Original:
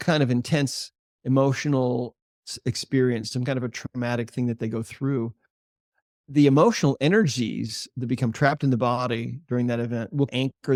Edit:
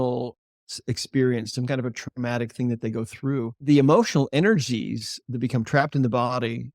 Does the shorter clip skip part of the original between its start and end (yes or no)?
yes